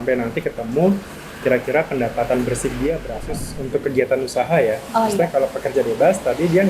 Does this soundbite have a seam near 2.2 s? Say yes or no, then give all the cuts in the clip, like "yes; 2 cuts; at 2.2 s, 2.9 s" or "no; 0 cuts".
no; 1 cut; at 3.5 s